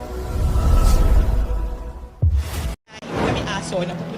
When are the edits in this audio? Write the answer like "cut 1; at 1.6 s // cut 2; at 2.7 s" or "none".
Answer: cut 1; at 2.9 s